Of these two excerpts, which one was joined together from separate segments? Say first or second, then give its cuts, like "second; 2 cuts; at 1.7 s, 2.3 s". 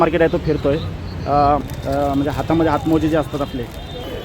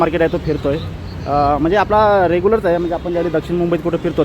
first; 1 cut; at 1.6 s